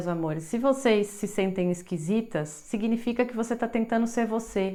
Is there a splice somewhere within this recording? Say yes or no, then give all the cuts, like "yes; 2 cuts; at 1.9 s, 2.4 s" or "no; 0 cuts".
no; 0 cuts